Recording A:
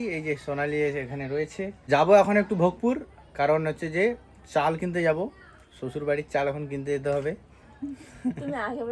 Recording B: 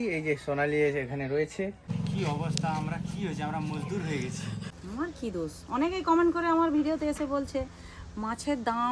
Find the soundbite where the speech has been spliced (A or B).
B